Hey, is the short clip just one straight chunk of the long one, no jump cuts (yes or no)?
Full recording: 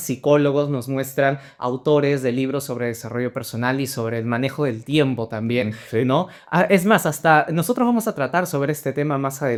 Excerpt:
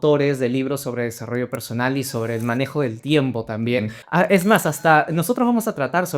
no